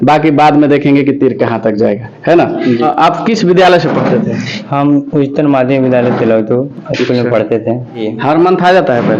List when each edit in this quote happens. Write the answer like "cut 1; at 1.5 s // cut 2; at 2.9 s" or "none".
cut 1; at 2.8 s // cut 2; at 8.1 s